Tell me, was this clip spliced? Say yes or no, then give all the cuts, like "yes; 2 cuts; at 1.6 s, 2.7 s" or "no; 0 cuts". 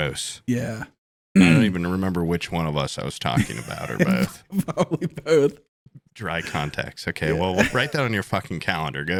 no; 0 cuts